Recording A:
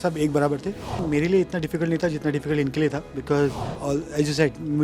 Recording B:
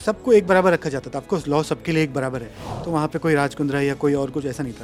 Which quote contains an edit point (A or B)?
A